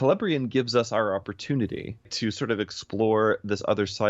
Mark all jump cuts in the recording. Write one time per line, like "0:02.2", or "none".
0:02.1